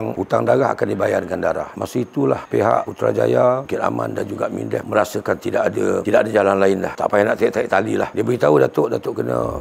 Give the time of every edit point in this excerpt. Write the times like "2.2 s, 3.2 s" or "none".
1.7 s, 8.1 s

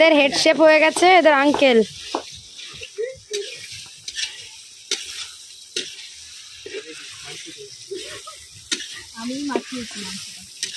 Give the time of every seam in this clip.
none

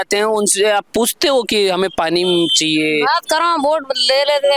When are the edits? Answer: none

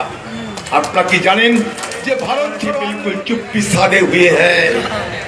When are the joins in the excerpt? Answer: 3.0 s

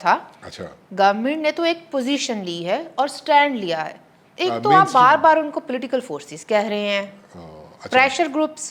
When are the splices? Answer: 4.3 s

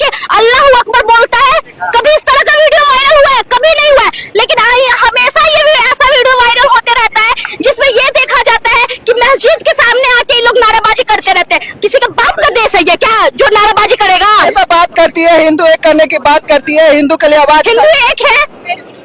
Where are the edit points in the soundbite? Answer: 14.5 s

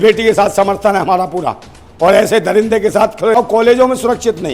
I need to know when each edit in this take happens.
3.4 s

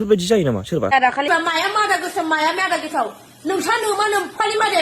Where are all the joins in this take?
1.3 s

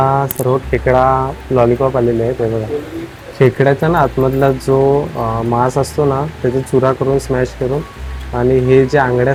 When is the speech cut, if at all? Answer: none

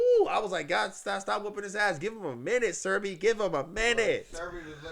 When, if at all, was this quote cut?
none

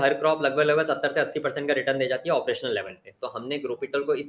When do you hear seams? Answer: 3.1 s

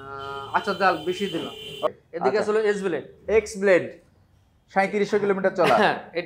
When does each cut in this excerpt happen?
1.9 s

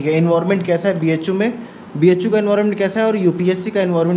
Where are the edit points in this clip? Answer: none

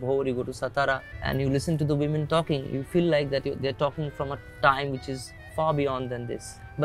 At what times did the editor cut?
1.1 s

